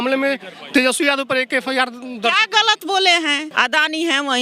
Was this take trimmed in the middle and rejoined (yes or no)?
yes